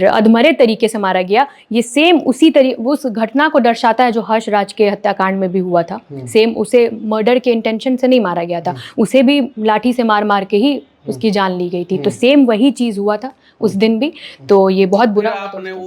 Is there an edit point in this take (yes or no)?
no